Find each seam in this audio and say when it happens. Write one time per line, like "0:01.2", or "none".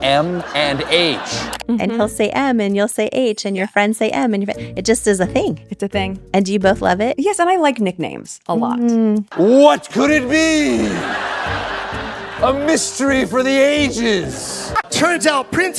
0:14.6